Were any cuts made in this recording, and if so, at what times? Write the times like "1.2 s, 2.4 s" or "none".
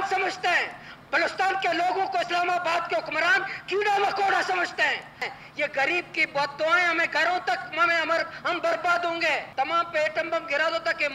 5.2 s, 9.4 s

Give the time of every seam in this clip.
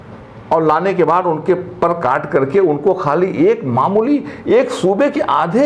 none

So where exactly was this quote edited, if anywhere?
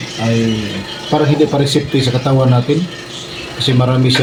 none

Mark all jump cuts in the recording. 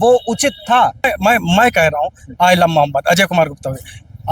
1.1 s

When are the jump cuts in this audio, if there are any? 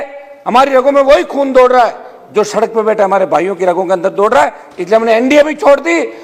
none

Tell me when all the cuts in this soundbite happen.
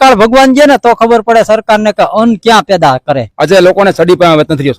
3.3 s

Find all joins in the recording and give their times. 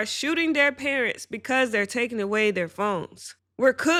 none

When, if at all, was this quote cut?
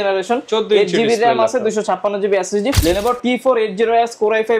2.8 s

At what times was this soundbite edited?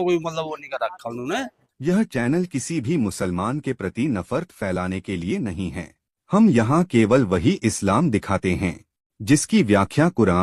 1.3 s

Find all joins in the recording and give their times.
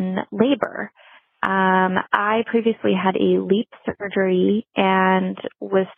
none

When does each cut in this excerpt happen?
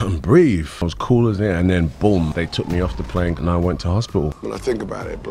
0.8 s, 4.4 s

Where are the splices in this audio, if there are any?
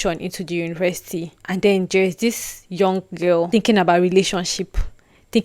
1.4 s, 3.5 s

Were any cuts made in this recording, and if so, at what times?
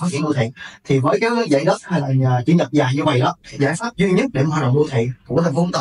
3.4 s

